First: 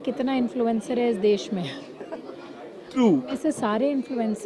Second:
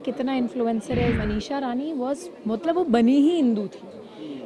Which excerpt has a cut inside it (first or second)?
second